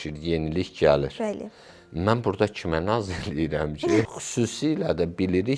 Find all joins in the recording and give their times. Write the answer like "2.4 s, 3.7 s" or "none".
4.1 s